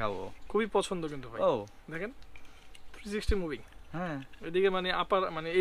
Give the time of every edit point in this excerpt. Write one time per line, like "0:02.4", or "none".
none